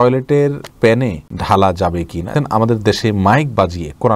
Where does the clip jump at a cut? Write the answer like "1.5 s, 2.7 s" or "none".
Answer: 0.9 s, 2.3 s